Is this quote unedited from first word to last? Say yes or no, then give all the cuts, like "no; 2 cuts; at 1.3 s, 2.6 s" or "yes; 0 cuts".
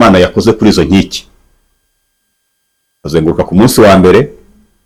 yes; 0 cuts